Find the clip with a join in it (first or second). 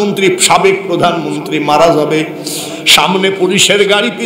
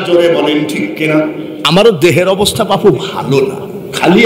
second